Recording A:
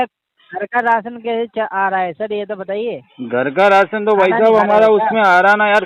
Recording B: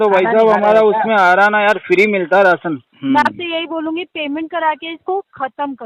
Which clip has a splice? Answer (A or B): B